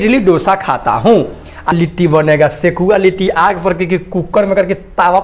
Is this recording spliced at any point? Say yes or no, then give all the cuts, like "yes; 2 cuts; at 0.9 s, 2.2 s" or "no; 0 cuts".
yes; 1 cut; at 1.7 s